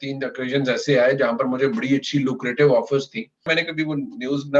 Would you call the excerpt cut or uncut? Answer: cut